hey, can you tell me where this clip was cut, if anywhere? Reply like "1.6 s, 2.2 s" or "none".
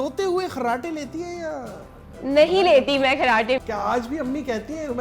3.6 s